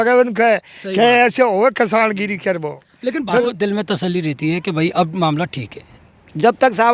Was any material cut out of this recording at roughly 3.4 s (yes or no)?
yes